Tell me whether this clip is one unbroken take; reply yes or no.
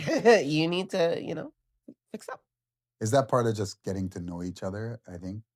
yes